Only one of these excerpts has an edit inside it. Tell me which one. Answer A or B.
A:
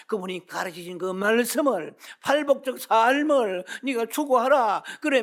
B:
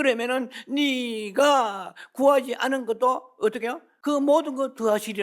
B